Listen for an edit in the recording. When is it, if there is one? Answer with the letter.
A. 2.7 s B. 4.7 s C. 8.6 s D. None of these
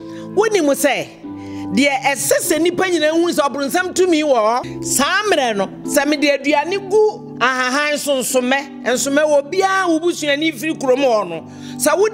B